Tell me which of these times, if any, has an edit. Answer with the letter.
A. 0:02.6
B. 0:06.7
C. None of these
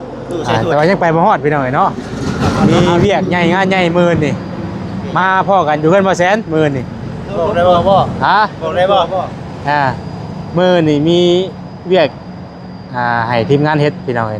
A